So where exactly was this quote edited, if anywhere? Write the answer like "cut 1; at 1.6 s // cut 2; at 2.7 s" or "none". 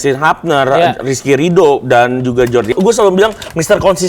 cut 1; at 2.7 s